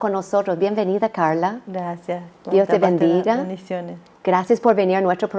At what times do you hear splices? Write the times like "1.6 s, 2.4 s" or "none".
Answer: none